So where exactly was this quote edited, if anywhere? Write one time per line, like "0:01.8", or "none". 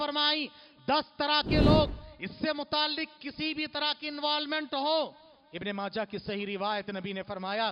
none